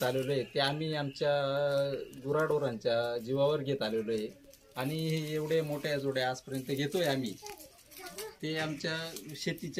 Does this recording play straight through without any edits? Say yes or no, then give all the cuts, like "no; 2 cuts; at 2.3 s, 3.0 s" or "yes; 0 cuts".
yes; 0 cuts